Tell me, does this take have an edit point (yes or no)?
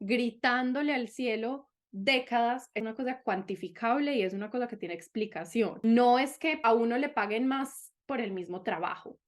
yes